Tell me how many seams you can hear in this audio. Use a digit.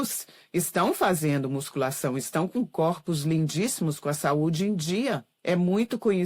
1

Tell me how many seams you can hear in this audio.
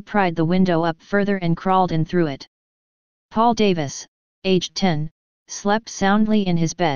0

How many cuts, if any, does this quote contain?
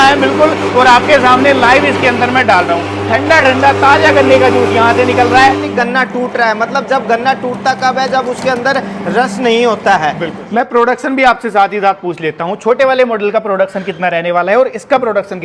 3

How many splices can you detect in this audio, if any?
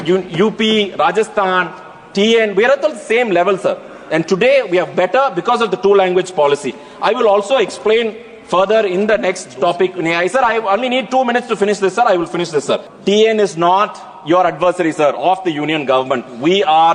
1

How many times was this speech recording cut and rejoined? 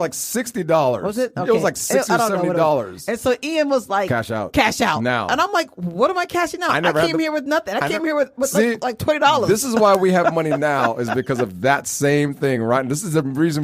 0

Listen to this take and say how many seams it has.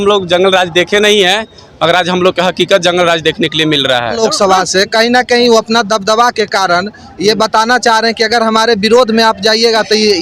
1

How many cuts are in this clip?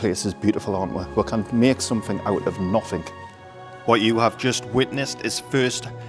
0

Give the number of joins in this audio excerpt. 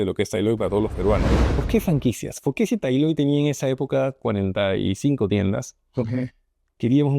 1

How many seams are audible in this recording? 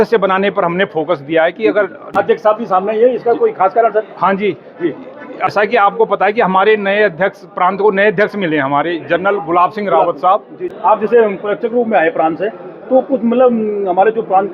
3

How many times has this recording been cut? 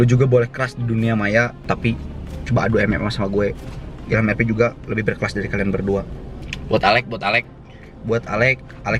1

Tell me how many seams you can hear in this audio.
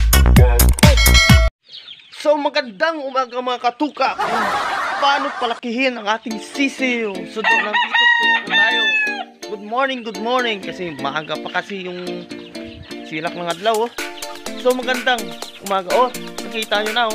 1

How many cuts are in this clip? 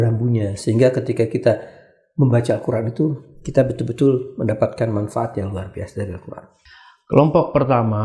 1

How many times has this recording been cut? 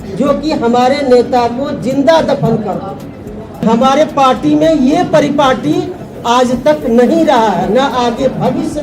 1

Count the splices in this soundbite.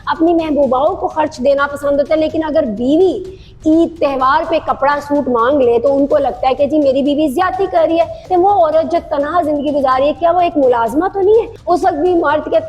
2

